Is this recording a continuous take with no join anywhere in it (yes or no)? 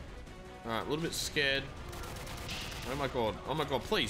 yes